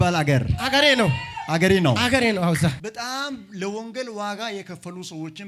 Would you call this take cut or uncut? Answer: cut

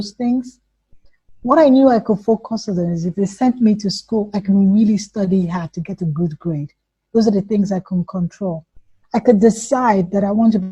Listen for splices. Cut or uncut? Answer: uncut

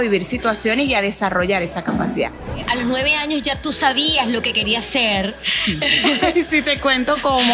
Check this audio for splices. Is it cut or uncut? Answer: cut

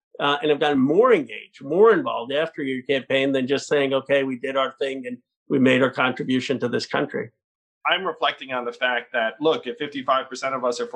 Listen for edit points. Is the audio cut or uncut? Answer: cut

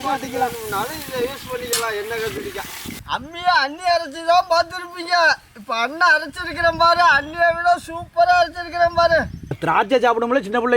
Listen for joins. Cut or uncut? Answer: cut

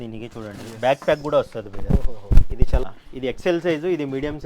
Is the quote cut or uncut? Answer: cut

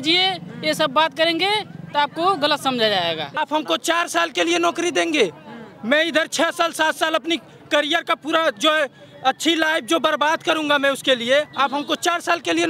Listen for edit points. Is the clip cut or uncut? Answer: cut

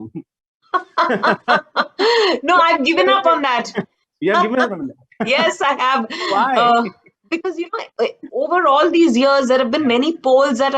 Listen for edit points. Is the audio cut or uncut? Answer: cut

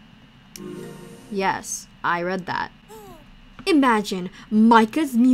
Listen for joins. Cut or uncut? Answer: uncut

